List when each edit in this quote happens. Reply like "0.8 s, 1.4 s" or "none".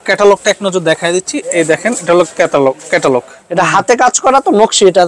3.3 s